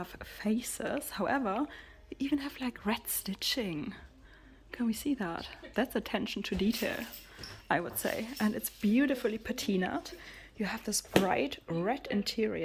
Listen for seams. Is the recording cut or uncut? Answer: uncut